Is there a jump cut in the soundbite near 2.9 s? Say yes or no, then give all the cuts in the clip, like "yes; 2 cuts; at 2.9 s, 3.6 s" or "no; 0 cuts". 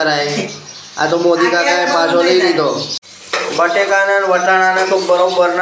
yes; 1 cut; at 2.9 s